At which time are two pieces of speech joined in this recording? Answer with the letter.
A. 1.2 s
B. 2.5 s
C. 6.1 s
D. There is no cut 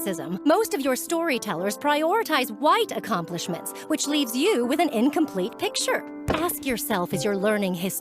C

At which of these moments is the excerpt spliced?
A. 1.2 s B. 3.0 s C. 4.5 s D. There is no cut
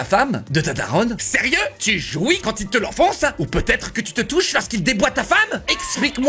A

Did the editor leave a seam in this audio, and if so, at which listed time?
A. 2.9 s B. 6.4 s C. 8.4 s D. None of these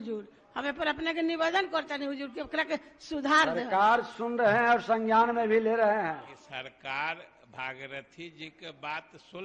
B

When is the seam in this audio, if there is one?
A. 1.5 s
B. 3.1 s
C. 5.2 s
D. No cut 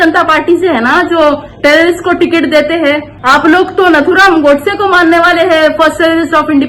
B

